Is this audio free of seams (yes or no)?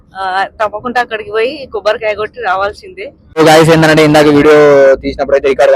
no